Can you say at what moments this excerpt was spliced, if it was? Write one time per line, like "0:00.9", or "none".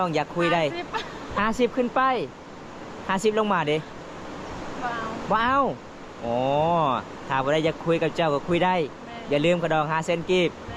none